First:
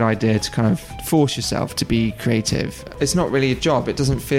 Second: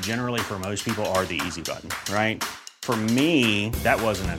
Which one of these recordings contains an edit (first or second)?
first